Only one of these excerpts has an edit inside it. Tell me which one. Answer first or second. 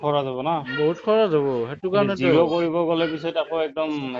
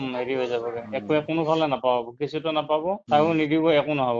second